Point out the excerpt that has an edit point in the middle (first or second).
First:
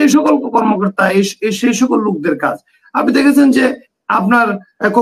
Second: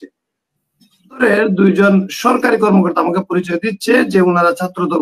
second